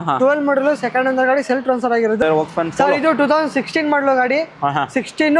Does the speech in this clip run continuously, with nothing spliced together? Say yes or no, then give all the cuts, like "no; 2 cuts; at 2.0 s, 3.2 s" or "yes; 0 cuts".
no; 1 cut; at 2.2 s